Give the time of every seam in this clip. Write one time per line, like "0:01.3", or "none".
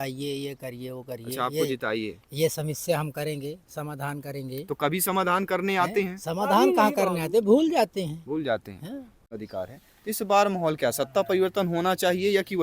0:09.3